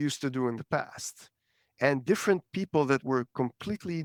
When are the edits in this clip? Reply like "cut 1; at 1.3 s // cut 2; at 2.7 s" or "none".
none

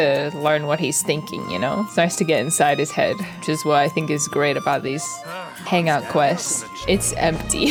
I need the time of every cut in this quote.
none

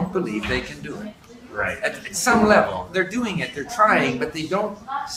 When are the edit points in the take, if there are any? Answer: none

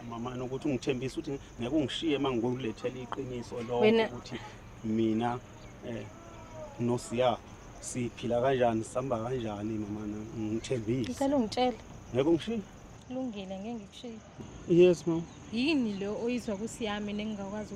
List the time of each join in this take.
cut 1; at 14.3 s

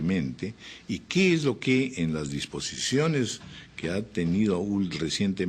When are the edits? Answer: cut 1; at 2.4 s

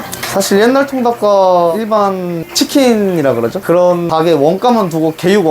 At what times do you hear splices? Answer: cut 1; at 1.7 s // cut 2; at 3.6 s

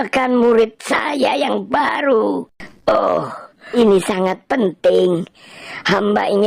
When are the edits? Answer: cut 1; at 3.3 s

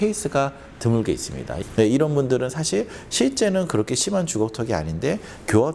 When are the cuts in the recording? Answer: cut 1; at 1.7 s

